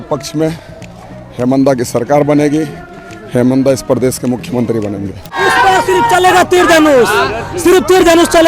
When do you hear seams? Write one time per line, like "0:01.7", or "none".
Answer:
0:05.4